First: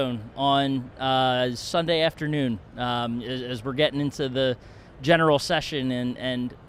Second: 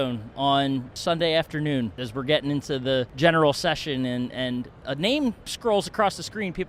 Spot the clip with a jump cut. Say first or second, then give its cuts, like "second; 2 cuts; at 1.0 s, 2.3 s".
second; 4 cuts; at 0.9 s, 2.0 s, 3.1 s, 5.5 s